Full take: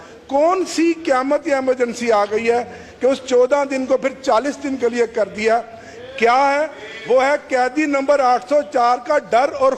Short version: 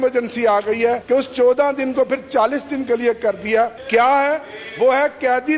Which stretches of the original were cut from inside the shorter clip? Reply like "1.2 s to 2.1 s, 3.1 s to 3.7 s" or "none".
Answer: 2.7 s to 2.9 s, 5.7 s to 6.1 s